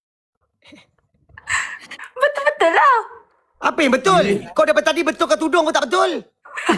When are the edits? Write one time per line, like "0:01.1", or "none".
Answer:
none